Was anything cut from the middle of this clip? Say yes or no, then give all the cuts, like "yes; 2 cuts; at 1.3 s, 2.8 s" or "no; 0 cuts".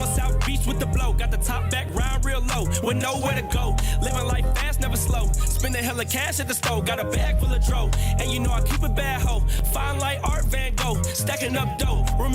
no; 0 cuts